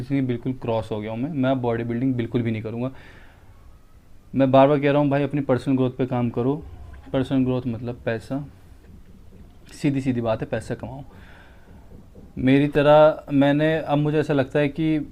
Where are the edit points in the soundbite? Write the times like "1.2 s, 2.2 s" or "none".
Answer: none